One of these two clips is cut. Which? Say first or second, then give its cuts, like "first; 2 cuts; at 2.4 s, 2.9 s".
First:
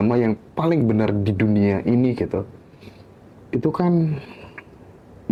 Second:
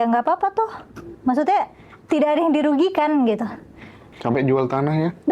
second; 1 cut; at 4.1 s